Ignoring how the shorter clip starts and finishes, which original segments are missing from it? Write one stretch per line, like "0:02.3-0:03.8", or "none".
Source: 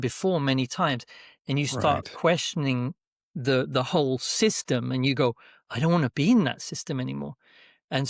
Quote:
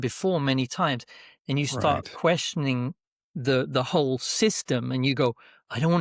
none